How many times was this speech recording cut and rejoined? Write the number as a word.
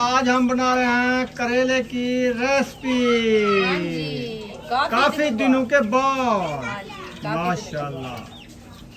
zero